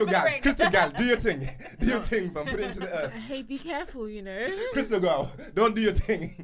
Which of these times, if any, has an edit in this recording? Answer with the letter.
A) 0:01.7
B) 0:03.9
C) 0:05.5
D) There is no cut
D